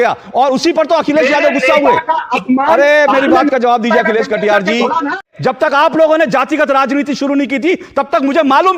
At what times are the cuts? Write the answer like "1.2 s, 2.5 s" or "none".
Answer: 5.2 s